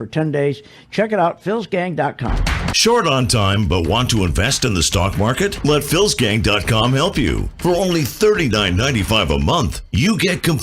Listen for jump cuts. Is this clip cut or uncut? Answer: cut